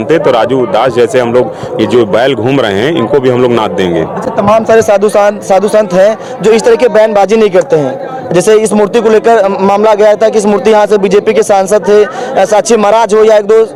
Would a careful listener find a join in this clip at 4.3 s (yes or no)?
no